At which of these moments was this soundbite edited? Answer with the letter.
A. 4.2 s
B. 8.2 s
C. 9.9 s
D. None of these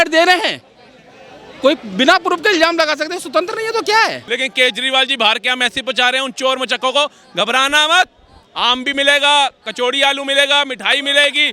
A